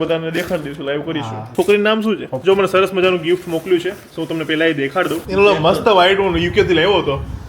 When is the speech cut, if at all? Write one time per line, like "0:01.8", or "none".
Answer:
0:01.4
0:02.3
0:05.2